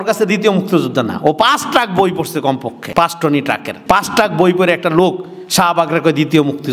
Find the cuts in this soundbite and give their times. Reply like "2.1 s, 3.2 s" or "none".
2.8 s, 3.7 s